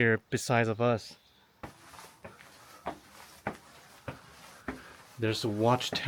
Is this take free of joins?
no; 1 cut; at 1.6 s

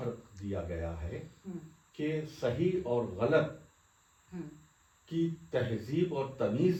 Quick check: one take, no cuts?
yes; 0 cuts

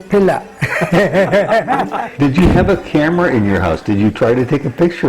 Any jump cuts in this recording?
yes; 1 cut; at 2.0 s

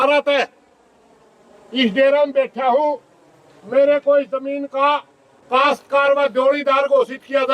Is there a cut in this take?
no; 0 cuts

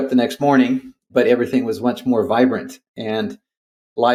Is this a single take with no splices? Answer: yes; 0 cuts

